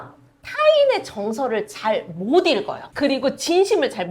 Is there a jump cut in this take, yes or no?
yes